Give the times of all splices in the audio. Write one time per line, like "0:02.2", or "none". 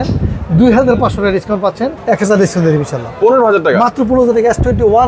0:01.9